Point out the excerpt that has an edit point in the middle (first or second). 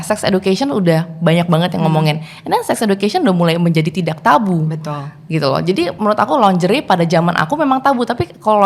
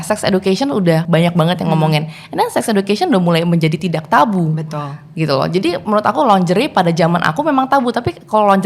second